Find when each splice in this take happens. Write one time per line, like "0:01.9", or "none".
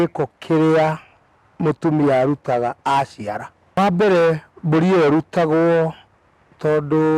0:03.8